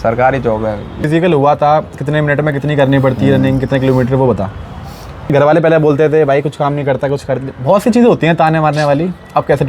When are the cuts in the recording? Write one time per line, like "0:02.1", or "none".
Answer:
0:01.0
0:05.3